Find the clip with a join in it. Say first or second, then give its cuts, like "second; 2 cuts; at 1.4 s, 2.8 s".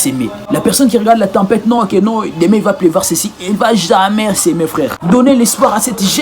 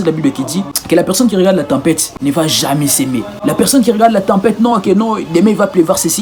first; 1 cut; at 5.0 s